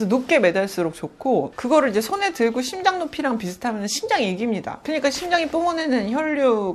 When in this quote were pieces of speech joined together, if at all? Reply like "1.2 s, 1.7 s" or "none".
none